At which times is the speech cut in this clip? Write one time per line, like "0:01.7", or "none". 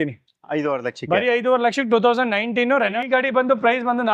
0:03.0